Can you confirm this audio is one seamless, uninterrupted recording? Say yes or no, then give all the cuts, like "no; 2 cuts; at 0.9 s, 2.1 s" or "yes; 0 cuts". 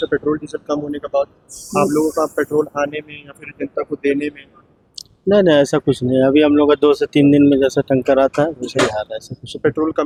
yes; 0 cuts